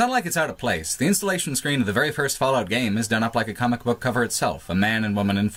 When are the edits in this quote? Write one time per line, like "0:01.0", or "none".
none